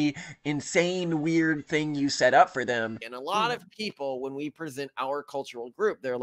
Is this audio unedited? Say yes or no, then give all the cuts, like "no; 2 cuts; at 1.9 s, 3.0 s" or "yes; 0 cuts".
no; 1 cut; at 3.1 s